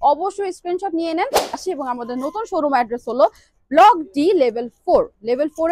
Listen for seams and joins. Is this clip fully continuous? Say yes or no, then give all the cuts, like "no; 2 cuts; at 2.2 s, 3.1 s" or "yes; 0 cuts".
no; 1 cut; at 1.6 s